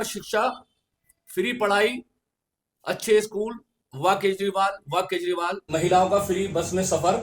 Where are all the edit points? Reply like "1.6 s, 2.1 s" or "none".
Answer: 5.6 s

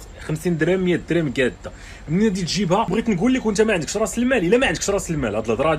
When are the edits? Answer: 2.9 s

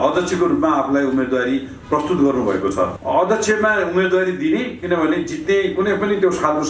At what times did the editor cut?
3.0 s

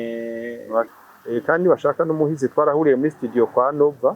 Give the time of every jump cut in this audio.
1.0 s

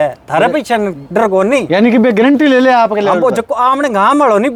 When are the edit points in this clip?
none

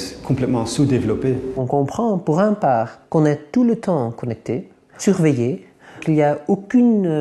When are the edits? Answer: 1.5 s, 3.0 s, 5.0 s, 6.0 s

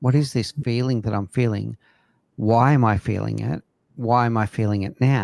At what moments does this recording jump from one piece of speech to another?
none

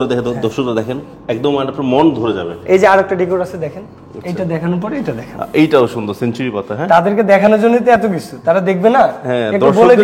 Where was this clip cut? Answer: none

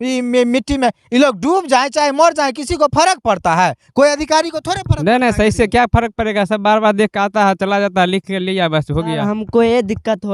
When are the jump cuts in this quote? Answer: 9.3 s

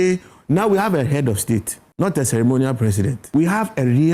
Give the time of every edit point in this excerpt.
1.8 s, 3.2 s

